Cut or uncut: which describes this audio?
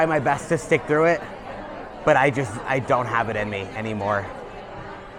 uncut